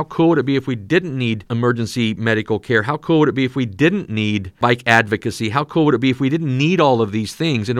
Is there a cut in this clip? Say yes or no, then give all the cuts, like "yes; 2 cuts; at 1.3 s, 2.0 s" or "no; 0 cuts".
yes; 2 cuts; at 1.5 s, 4.5 s